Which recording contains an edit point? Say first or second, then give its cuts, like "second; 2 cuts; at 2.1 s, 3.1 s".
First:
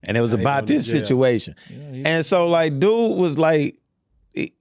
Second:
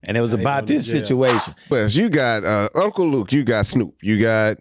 second; 1 cut; at 1.7 s